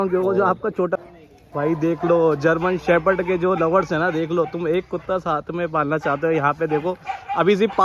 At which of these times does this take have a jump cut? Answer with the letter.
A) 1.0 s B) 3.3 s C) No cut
A